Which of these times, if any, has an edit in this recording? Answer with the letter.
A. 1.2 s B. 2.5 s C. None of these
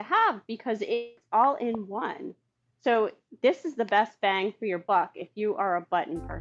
A